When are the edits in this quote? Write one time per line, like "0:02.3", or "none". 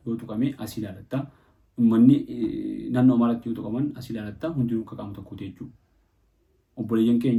none

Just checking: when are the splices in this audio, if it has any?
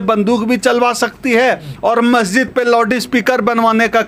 none

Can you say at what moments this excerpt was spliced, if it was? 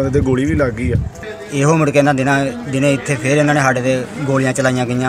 0:01.3

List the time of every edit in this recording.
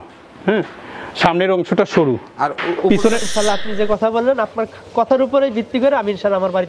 0:03.3

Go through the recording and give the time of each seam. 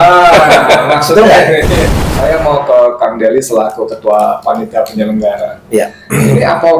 0:01.7

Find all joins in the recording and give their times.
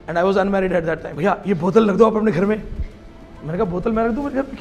0:01.1

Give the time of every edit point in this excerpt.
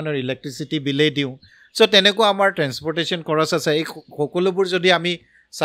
none

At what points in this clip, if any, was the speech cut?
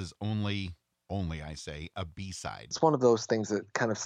0:02.7

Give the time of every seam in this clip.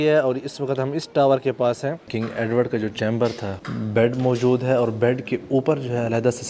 0:02.1
0:03.5

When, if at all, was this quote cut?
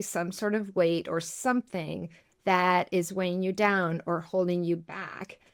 none

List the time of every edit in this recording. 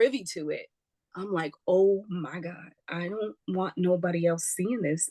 none

